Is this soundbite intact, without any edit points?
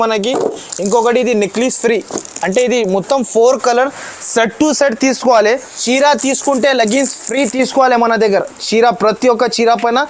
no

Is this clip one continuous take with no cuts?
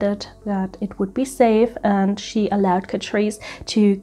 yes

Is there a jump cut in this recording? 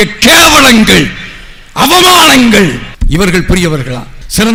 no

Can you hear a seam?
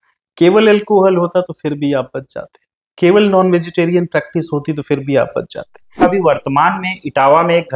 yes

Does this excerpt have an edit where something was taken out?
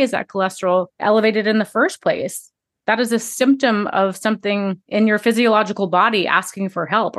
yes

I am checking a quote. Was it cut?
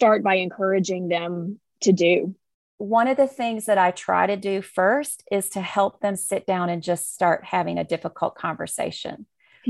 yes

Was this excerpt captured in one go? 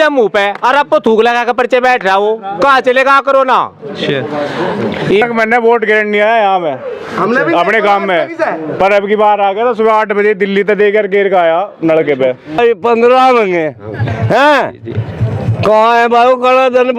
no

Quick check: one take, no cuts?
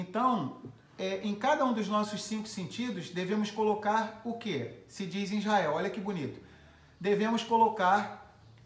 yes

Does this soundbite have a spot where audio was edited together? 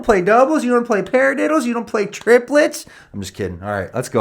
no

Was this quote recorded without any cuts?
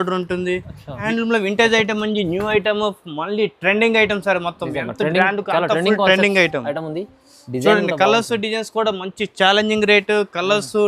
no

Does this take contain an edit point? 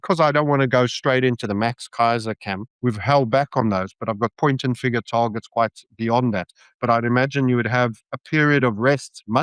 no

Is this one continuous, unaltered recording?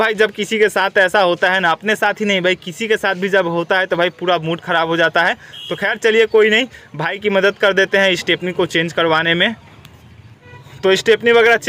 yes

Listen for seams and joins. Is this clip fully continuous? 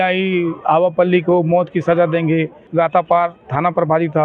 no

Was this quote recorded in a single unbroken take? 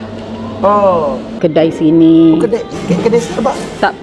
no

